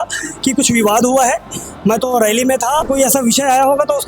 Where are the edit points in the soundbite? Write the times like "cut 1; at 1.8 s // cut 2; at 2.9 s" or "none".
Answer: cut 1; at 2.8 s